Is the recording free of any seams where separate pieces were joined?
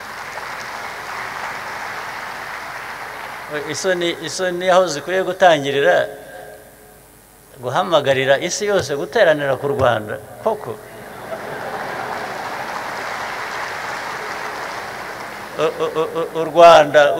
yes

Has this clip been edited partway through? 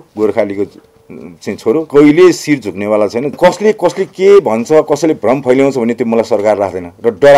yes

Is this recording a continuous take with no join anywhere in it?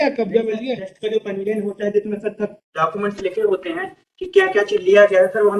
yes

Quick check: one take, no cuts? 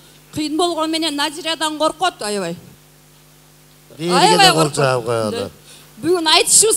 no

